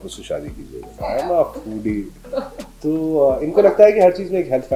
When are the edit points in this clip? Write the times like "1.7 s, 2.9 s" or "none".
0.9 s